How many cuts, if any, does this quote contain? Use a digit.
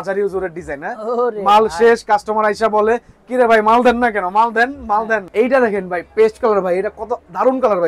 1